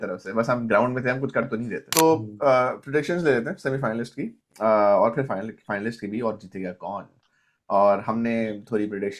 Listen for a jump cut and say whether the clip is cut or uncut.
cut